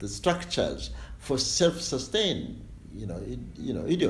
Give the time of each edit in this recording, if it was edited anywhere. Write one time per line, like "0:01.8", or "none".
none